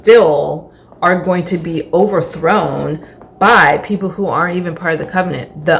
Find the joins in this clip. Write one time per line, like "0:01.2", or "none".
none